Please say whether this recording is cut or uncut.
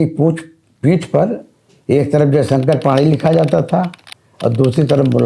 uncut